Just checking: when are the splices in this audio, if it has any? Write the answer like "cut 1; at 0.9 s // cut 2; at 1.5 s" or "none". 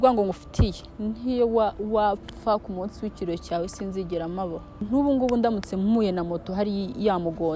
cut 1; at 4.8 s